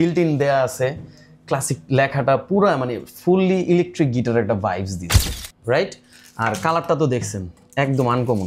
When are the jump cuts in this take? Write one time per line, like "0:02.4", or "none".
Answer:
0:05.2

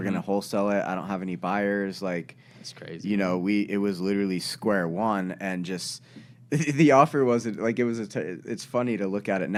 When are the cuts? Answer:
none

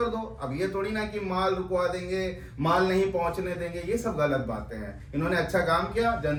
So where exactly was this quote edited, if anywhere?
none

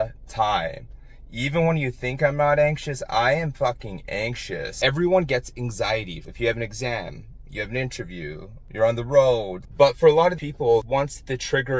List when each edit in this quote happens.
0:04.7
0:06.2

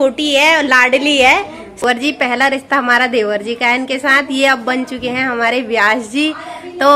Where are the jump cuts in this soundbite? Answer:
0:01.8

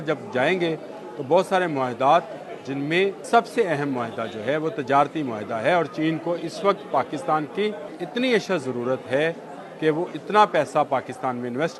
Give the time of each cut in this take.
0:03.2
0:07.9

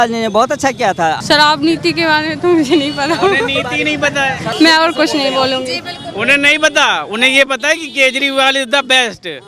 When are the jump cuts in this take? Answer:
0:01.2
0:04.4

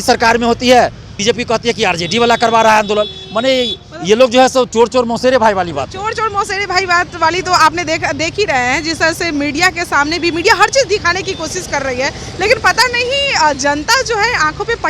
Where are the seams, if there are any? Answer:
none

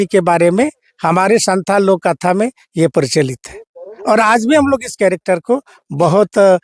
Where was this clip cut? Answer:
none

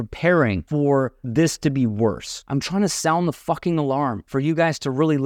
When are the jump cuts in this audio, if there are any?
0:00.9
0:02.3
0:04.2

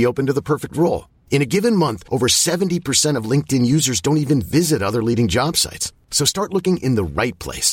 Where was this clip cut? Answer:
none

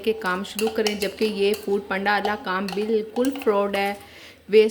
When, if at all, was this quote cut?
none

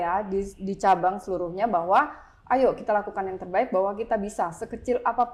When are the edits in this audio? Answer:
none

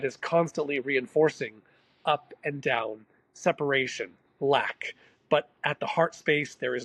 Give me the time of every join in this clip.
none

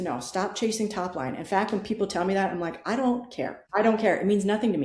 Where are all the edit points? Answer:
0:03.6

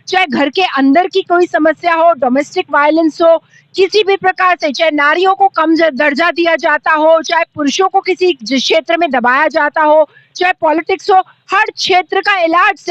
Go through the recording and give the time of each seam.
none

